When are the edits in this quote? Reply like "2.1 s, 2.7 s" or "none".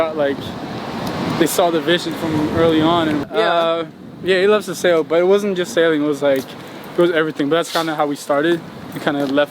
3.2 s